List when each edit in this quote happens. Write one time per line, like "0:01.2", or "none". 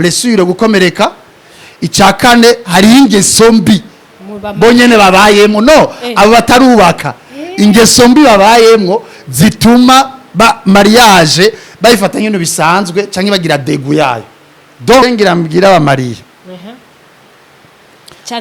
0:15.0